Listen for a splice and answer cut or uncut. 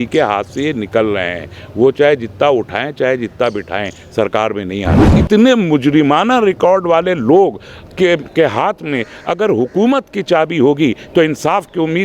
cut